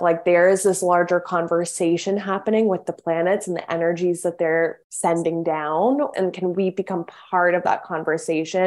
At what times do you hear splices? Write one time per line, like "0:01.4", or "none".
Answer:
0:04.8
0:06.1